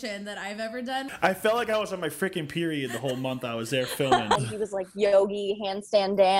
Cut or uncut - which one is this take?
cut